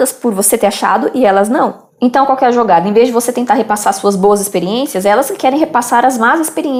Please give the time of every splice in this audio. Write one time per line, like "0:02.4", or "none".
none